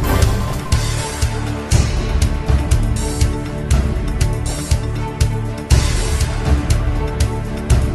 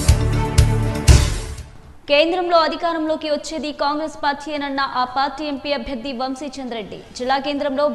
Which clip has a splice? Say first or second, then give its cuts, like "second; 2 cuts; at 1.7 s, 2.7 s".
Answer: second; 1 cut; at 1.5 s